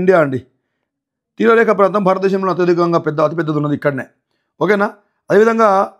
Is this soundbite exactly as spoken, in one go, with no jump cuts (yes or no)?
yes